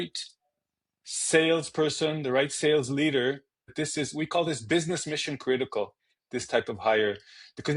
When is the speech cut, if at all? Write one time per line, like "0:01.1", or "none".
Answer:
0:03.7